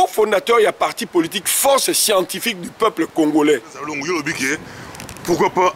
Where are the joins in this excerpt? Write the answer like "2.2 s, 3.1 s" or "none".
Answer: 3.9 s